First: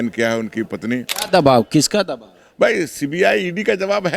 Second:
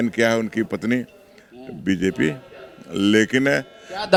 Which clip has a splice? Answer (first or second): first